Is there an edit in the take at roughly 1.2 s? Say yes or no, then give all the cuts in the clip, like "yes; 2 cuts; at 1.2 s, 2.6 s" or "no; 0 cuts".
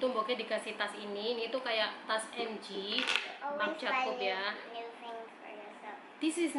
no; 0 cuts